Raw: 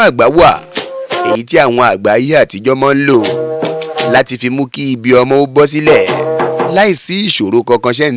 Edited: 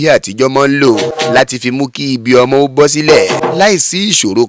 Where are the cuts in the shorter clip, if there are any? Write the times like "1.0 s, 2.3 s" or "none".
1.1 s, 3.4 s